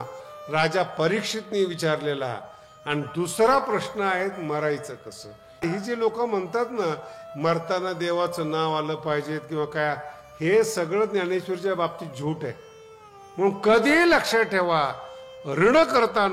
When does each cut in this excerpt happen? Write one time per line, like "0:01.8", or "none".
0:05.6
0:13.3